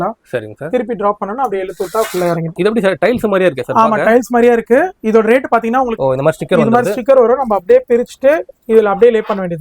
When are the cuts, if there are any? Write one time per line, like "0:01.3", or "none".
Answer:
0:02.6
0:05.9